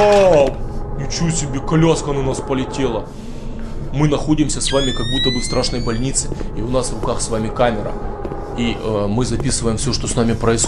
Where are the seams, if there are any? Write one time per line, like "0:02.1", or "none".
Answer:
none